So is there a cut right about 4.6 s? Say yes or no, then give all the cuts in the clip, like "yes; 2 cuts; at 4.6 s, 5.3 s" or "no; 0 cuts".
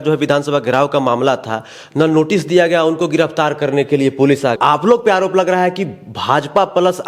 yes; 1 cut; at 4.6 s